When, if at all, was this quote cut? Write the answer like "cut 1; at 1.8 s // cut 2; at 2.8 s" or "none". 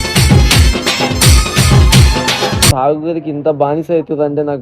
cut 1; at 2.7 s